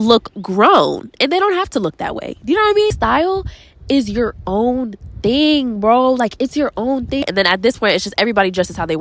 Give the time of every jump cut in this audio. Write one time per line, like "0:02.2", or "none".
0:02.9
0:07.3